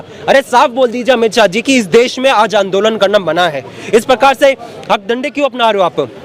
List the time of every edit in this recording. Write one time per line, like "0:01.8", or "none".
none